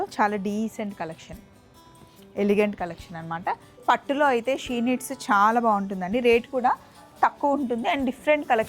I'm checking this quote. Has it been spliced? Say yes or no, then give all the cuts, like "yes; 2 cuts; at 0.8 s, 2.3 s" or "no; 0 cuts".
yes; 1 cut; at 3.8 s